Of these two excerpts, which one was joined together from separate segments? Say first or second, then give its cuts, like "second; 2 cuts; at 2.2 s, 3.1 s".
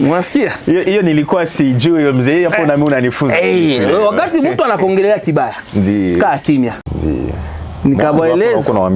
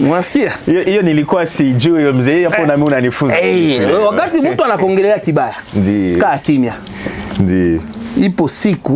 first; 1 cut; at 6.9 s